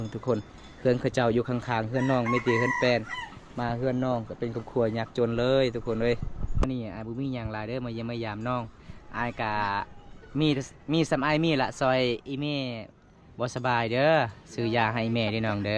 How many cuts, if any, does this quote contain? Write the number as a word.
zero